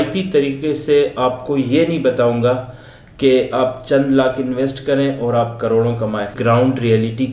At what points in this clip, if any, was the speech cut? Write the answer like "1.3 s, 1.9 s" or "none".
6.3 s